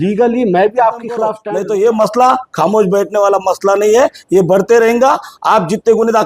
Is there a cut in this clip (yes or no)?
yes